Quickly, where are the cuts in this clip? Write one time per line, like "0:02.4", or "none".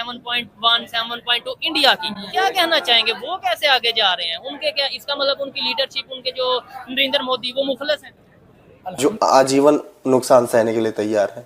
0:09.0